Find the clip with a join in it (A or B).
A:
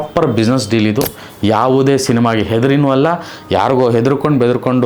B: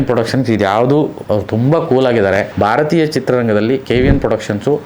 B